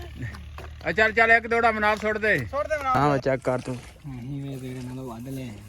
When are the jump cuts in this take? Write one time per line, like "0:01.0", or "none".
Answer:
0:02.7